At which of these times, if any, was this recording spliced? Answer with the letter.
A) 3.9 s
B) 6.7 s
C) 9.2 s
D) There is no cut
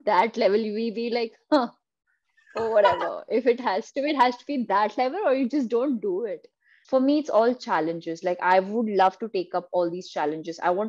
B